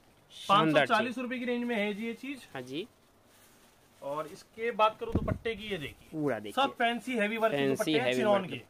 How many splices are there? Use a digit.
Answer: 0